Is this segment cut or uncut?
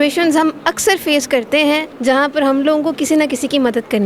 cut